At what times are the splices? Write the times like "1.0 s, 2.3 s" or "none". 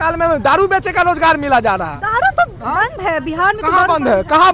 none